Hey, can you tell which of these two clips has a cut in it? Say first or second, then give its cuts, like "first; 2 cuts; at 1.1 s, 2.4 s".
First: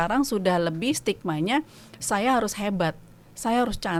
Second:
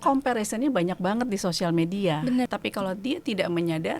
second; 1 cut; at 2.5 s